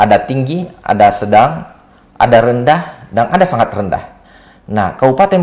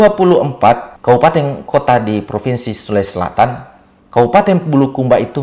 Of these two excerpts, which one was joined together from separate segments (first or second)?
second